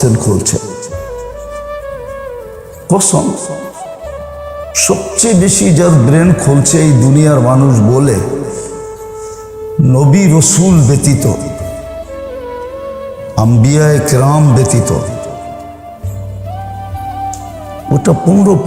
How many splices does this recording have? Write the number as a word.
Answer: four